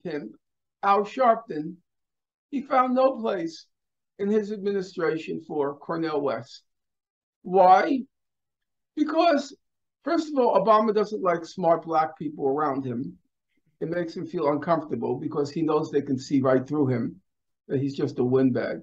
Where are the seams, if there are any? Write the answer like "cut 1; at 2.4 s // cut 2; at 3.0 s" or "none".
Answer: none

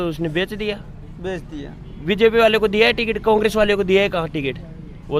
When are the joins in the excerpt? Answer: none

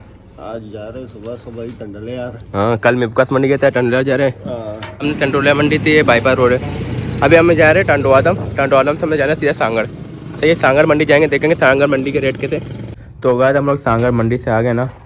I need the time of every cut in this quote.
cut 1; at 5.0 s // cut 2; at 12.8 s

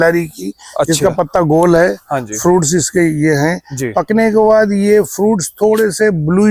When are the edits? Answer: none

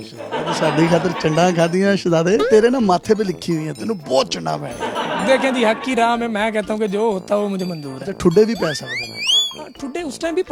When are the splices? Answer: none

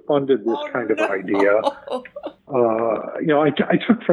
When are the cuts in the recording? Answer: cut 1; at 2.3 s

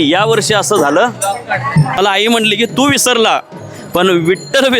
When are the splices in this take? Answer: cut 1; at 2.0 s

